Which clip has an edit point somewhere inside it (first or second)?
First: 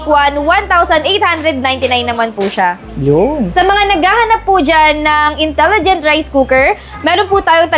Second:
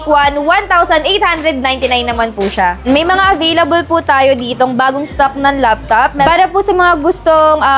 second